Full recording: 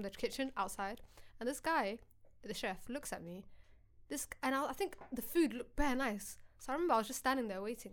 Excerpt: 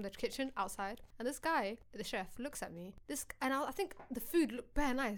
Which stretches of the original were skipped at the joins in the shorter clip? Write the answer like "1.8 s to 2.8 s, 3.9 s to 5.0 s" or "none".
1.1 s to 1.3 s, 2.1 s to 2.4 s, 3.5 s to 4.0 s